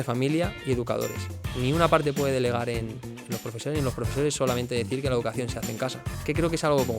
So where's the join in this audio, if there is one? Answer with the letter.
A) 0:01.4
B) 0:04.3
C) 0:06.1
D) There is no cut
C